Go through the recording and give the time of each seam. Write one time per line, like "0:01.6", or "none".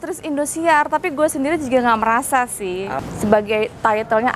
0:03.0